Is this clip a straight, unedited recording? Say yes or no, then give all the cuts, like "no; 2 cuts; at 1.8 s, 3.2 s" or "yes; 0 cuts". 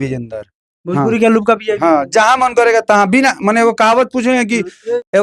yes; 0 cuts